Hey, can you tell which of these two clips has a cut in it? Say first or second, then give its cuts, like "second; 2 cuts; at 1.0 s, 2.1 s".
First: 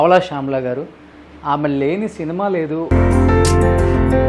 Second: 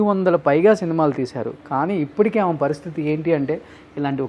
first; 1 cut; at 2.8 s